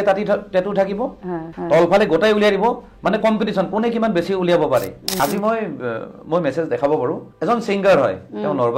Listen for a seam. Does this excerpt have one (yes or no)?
yes